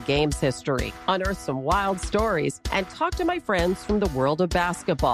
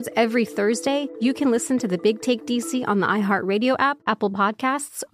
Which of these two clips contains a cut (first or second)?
second